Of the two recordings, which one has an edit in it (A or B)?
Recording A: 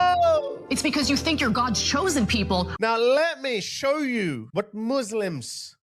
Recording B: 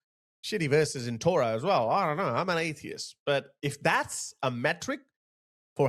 A